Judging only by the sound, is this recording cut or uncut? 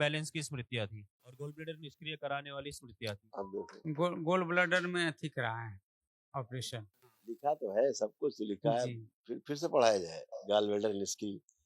cut